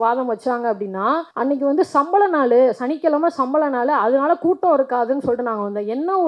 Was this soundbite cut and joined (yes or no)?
yes